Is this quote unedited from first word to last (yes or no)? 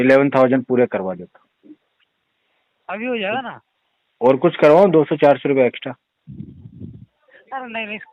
yes